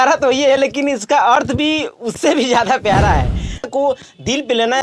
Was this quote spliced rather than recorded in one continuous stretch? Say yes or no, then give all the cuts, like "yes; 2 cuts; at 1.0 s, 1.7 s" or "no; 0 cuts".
yes; 1 cut; at 3.7 s